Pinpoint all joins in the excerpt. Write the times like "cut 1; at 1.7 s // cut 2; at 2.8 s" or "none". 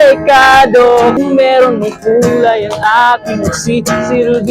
cut 1; at 1.1 s